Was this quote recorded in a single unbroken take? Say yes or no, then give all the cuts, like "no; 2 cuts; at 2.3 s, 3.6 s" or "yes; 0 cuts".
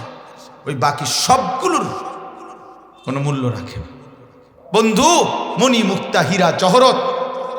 no; 1 cut; at 4.5 s